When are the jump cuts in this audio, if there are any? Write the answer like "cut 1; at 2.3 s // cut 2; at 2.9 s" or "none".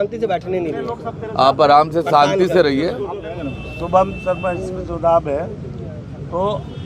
cut 1; at 3.2 s